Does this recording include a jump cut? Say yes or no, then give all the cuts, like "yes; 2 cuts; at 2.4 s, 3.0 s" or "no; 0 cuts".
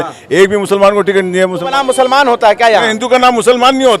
yes; 1 cut; at 1.7 s